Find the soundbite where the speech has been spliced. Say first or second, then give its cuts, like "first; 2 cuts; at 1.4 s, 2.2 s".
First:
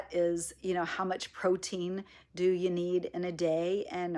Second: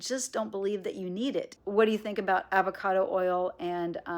second; 1 cut; at 1.5 s